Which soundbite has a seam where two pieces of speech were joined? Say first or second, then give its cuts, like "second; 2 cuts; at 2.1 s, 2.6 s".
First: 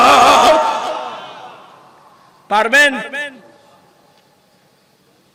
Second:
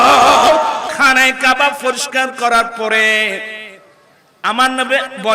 second; 1 cut; at 0.9 s